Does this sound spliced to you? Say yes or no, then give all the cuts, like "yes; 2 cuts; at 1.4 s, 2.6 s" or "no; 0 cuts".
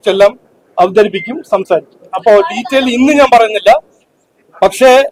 no; 0 cuts